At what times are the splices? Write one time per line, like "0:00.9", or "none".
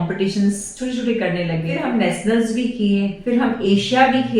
0:01.7